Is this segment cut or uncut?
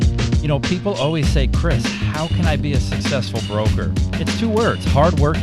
uncut